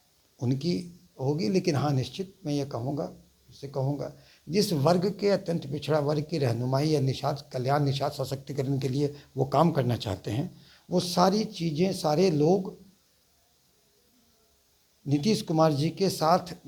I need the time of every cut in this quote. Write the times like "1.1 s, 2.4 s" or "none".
none